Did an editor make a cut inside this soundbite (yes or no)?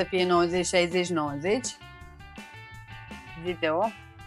no